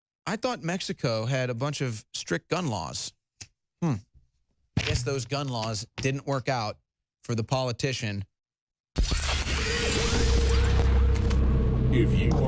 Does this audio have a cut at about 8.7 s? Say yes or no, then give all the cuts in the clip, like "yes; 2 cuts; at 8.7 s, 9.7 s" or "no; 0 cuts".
yes; 1 cut; at 8.7 s